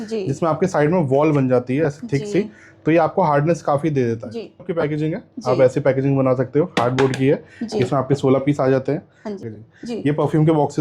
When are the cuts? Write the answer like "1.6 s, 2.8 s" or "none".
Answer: 4.7 s, 9.4 s